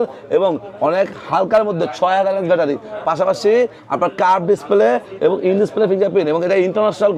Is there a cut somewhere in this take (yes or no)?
no